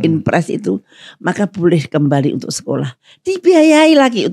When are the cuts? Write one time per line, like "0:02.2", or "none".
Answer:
none